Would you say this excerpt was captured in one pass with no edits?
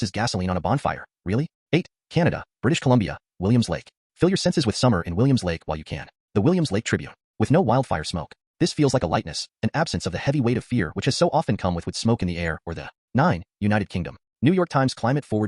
no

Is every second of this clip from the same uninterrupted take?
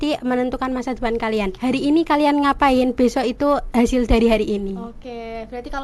yes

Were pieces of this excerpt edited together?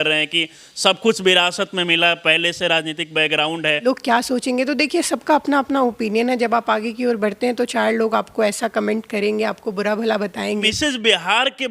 yes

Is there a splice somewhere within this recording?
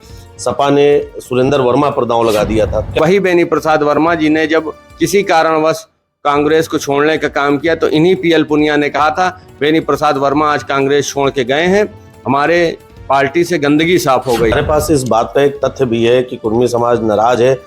yes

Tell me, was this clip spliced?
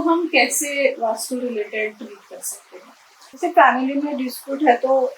no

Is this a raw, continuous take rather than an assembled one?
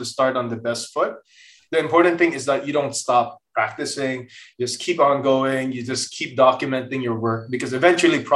yes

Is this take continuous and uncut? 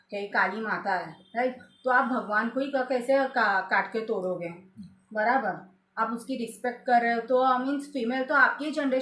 yes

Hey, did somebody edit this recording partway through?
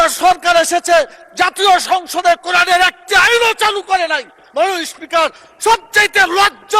no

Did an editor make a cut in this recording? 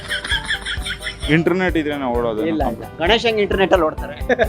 yes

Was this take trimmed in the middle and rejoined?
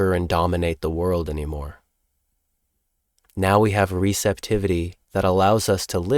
yes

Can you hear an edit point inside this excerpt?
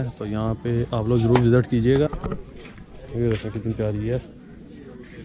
yes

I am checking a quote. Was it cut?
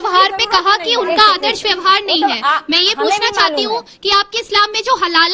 no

